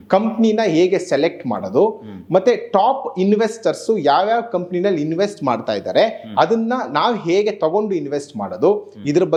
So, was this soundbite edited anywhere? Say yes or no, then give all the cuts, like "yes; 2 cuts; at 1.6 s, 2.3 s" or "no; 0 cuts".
no; 0 cuts